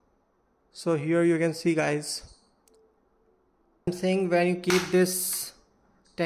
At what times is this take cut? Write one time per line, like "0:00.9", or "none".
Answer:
0:03.9

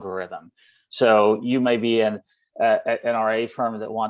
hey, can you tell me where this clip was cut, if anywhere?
none

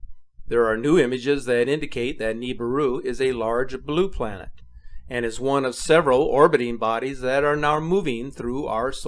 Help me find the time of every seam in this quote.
0:08.1

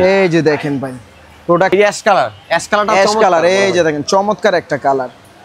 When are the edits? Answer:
0:01.7

